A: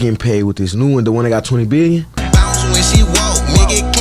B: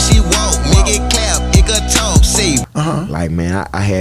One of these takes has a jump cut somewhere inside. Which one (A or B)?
B